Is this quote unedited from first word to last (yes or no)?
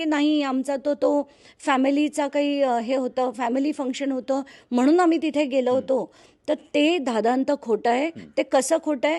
yes